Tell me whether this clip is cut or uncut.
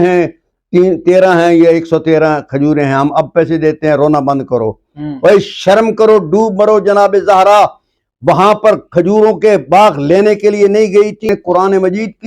cut